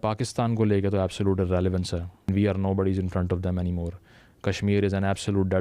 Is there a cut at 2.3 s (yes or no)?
yes